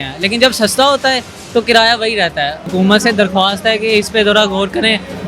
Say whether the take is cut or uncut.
cut